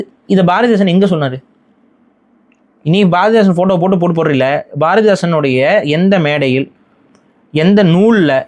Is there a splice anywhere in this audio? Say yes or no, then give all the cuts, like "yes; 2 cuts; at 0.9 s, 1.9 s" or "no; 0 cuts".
no; 0 cuts